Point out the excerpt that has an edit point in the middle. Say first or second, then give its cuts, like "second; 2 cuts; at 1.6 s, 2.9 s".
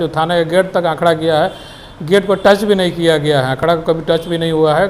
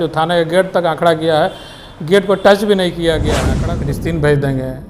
second; 1 cut; at 3.4 s